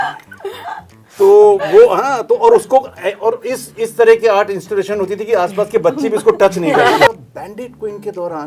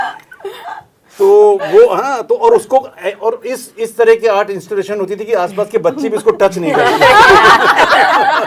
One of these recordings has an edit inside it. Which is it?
first; 1 cut; at 7.1 s

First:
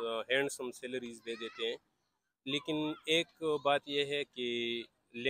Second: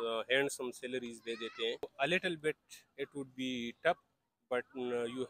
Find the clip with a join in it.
second; 1 cut; at 1.9 s

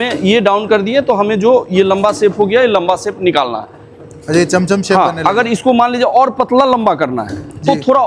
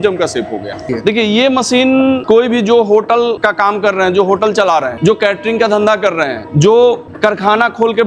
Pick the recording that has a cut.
second; 6 cuts; at 0.9 s, 2.2 s, 3.4 s, 4.9 s, 6.4 s, 7.1 s

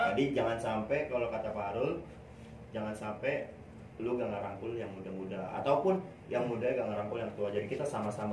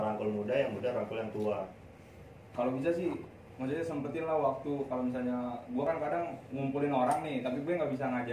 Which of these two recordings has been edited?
second; 1 cut; at 1.8 s

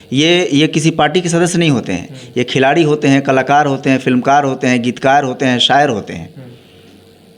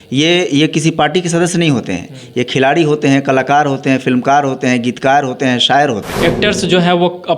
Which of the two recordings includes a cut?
second; 1 cut; at 6.1 s

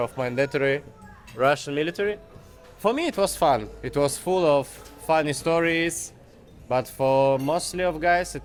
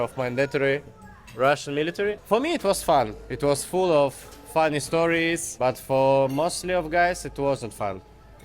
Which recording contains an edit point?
second; 2 cuts; at 2.2 s, 5.5 s

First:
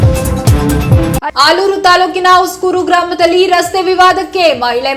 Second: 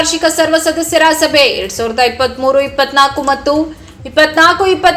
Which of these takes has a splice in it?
first; 1 cut; at 1.3 s

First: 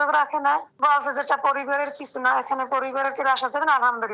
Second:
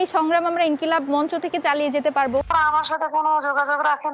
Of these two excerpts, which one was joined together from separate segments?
second; 1 cut; at 2.5 s

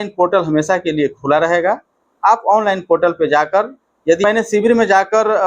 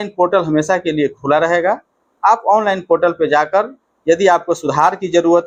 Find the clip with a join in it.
first; 1 cut; at 4.2 s

